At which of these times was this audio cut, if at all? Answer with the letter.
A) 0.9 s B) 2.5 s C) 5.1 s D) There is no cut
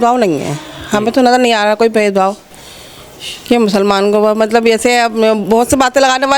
D